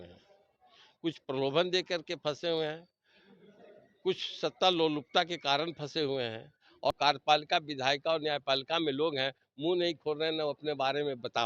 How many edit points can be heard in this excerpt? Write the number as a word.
one